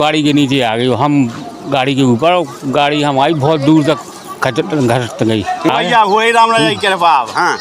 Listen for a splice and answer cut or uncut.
cut